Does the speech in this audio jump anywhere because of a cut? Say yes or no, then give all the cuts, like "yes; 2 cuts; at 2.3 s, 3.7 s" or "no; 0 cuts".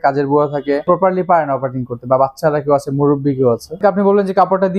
yes; 2 cuts; at 0.9 s, 3.8 s